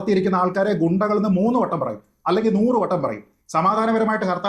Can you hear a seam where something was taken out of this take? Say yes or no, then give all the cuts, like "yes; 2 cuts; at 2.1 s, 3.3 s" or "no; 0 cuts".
no; 0 cuts